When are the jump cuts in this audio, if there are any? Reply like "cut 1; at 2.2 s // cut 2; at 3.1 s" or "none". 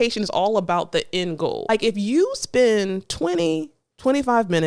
cut 1; at 1.6 s